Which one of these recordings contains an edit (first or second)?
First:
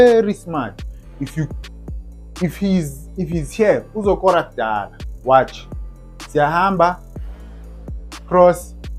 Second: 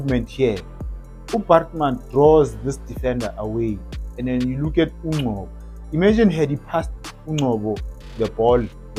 first